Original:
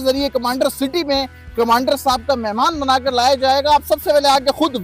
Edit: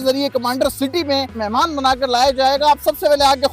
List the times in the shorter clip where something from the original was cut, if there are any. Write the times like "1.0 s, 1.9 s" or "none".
1.4 s